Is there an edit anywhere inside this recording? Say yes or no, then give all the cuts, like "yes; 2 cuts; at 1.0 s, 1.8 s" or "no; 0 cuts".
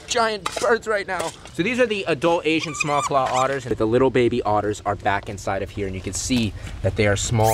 yes; 2 cuts; at 1.4 s, 3.7 s